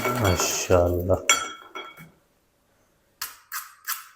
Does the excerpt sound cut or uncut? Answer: cut